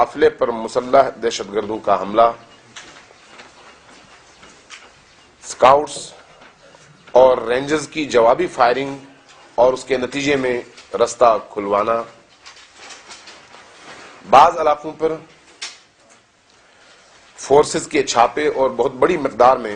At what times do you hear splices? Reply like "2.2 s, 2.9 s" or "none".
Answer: none

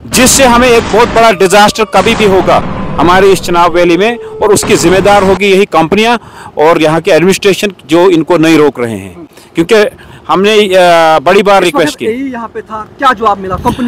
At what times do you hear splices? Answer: none

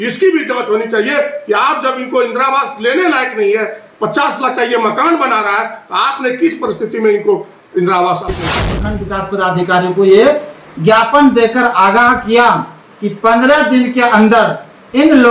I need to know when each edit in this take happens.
8.6 s

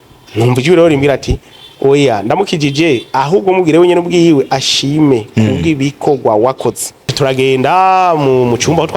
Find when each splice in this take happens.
7.1 s

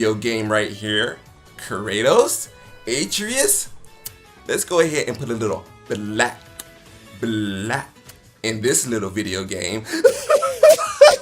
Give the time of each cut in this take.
10.1 s

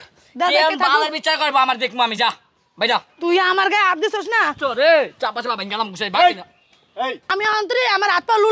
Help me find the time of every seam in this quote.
7.2 s

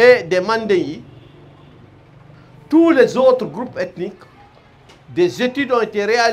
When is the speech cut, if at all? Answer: none

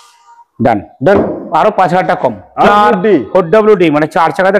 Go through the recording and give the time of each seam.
2.7 s

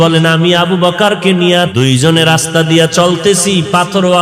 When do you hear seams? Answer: 1.7 s

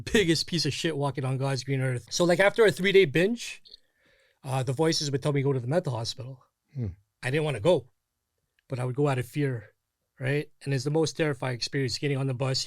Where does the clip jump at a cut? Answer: 2.0 s

